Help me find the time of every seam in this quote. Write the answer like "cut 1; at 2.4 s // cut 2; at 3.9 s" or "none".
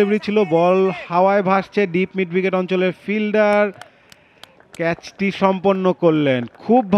none